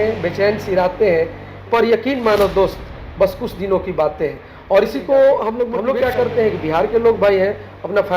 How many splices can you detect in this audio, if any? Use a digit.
2